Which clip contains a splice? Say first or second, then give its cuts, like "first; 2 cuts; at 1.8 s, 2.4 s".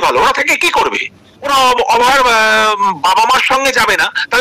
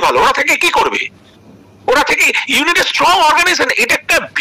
first; 1 cut; at 1.4 s